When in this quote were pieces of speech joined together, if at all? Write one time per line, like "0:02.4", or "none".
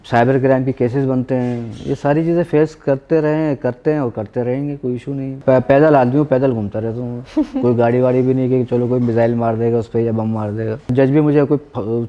0:05.4
0:10.9